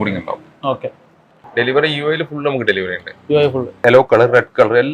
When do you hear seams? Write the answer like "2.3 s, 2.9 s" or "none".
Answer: 1.5 s, 3.8 s